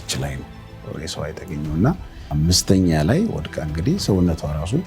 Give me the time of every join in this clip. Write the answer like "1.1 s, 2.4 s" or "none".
2.2 s